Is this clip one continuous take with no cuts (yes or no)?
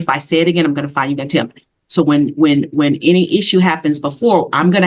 yes